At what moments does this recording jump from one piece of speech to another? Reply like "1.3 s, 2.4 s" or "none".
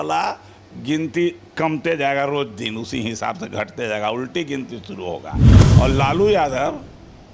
5.5 s